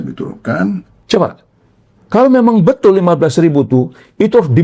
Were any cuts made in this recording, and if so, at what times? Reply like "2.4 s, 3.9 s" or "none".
0.9 s